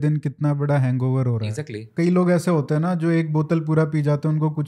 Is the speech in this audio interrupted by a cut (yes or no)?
yes